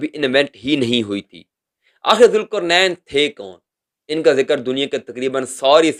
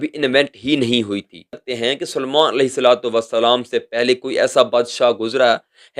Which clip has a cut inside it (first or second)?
second